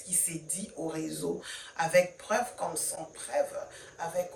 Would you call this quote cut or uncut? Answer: uncut